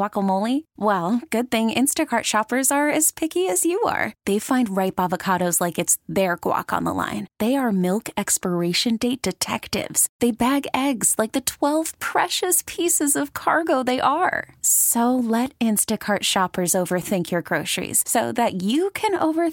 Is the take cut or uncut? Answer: uncut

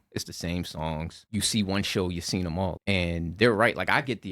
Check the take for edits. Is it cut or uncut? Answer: cut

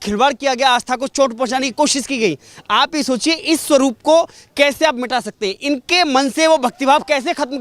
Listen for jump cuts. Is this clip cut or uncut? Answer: uncut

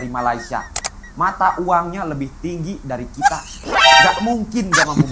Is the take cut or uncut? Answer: uncut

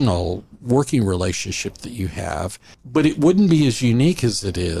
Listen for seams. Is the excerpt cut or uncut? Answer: cut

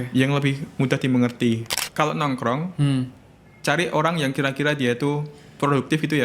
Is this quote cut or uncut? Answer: cut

